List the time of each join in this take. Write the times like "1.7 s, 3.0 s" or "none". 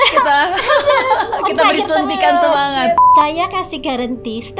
3.1 s